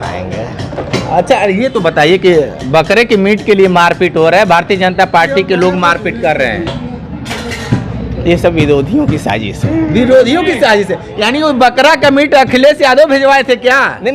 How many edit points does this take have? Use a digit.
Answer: 0